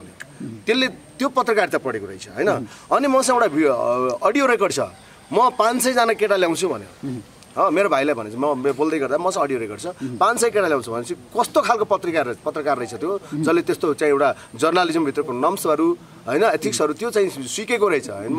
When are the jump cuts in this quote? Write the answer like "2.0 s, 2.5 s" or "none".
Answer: none